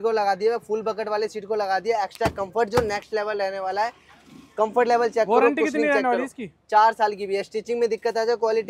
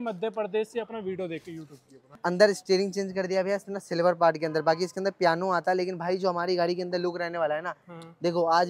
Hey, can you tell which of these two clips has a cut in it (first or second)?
second